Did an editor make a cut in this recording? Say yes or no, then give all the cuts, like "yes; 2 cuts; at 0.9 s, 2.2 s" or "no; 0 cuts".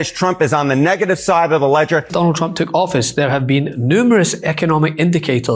yes; 1 cut; at 2.1 s